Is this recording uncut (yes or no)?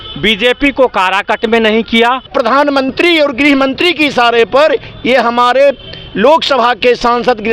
no